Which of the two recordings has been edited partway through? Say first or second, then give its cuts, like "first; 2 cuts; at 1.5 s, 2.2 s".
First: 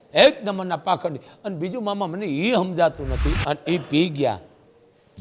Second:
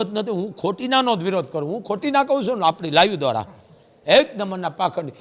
first; 1 cut; at 3.3 s